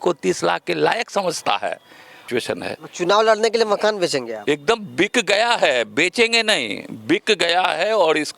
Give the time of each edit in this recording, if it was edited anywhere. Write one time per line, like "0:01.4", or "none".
0:02.2

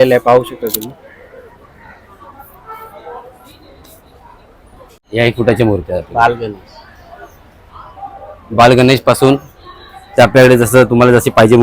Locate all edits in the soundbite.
0:05.0

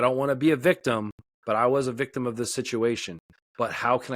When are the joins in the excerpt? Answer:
none

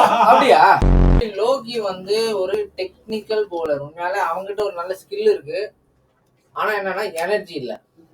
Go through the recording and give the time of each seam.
0:01.2

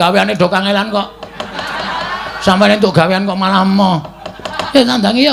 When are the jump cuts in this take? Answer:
none

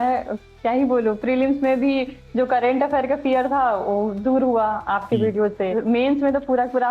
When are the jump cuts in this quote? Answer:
0:05.7

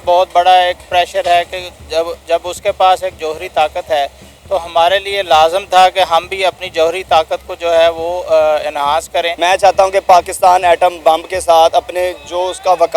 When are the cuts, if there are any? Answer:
0:09.3

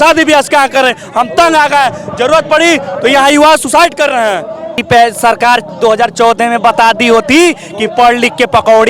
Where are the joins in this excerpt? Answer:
0:04.8

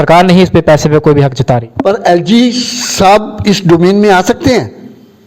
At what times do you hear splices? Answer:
none

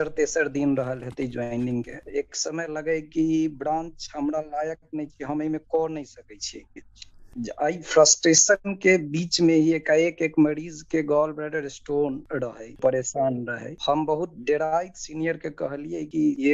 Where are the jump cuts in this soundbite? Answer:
0:07.2
0:12.8

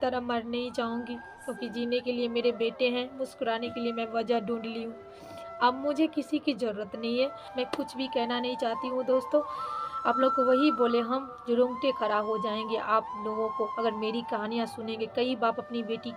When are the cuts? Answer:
0:07.4

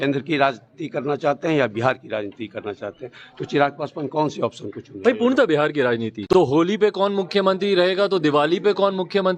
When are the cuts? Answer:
0:06.1

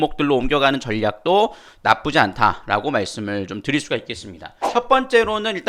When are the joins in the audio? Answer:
0:04.6

